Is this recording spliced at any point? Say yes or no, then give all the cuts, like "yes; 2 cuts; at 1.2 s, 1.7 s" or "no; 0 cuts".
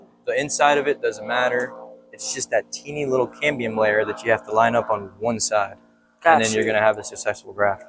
no; 0 cuts